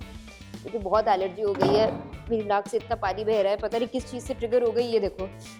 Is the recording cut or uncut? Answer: uncut